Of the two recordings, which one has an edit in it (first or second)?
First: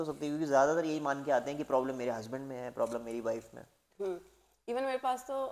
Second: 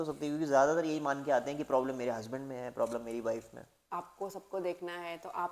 second